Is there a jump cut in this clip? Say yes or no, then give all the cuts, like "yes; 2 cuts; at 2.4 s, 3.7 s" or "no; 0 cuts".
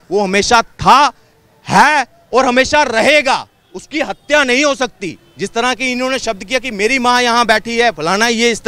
no; 0 cuts